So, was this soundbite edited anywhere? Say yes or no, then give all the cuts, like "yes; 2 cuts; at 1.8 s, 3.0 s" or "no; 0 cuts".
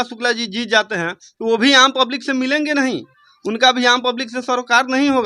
no; 0 cuts